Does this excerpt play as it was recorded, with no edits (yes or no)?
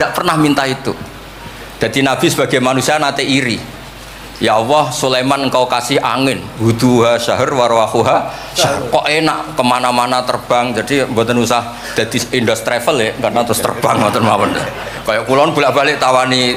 yes